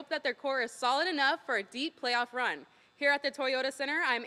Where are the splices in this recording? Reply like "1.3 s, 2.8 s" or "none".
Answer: none